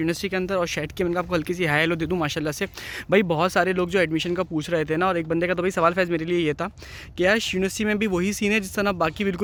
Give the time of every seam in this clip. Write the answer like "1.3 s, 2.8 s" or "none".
none

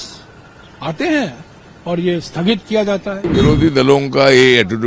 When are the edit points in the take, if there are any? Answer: 3.2 s

